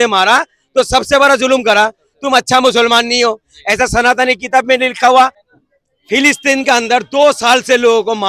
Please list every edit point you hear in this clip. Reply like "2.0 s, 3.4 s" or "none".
5.4 s